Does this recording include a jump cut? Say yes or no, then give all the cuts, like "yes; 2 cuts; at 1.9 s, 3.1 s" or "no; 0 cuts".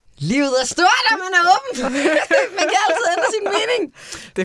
no; 0 cuts